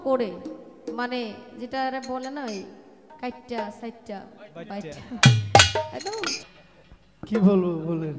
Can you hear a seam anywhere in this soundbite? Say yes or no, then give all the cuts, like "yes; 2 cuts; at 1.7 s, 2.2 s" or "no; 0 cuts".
yes; 1 cut; at 6.3 s